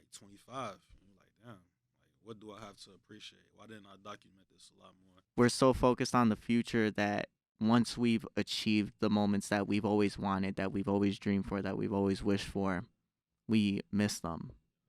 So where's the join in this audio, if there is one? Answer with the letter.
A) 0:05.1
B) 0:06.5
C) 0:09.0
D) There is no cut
A